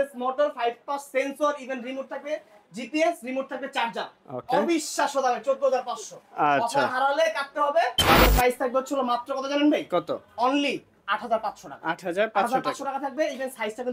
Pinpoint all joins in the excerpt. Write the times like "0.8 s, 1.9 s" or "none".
8.2 s